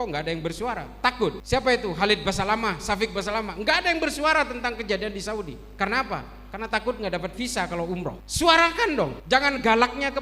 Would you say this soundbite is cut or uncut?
cut